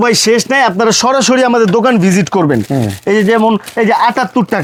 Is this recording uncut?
yes; 0 cuts

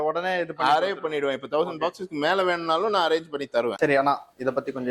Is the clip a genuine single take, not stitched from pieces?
no; 1 cut; at 3.8 s

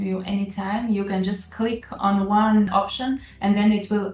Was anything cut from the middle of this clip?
no; 0 cuts

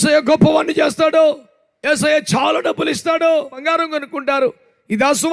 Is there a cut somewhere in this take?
yes; 1 cut; at 3.6 s

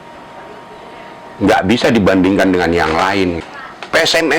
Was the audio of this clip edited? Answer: yes; 1 cut; at 3.5 s

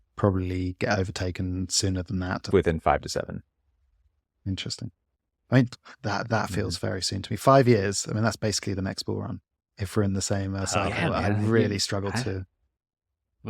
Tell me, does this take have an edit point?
yes; 1 cut; at 2.5 s

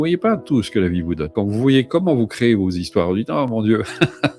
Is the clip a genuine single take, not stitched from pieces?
no; 1 cut; at 1.3 s

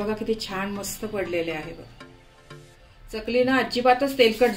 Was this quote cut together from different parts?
no; 0 cuts

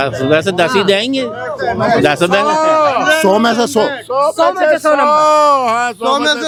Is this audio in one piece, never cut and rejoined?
yes; 0 cuts

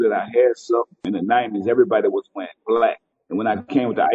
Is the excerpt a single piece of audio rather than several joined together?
no; 2 cuts; at 1.1 s, 3.1 s

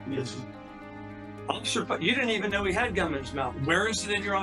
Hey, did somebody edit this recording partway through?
yes; 1 cut; at 3.5 s

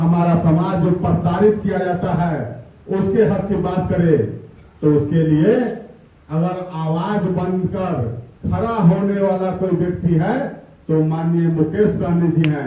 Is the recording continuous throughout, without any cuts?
yes; 0 cuts

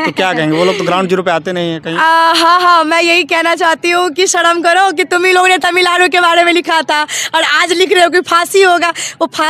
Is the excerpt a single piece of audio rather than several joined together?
yes; 0 cuts

